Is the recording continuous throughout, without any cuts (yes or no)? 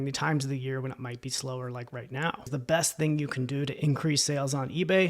no